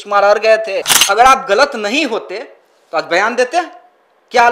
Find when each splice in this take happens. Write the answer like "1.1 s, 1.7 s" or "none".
0.9 s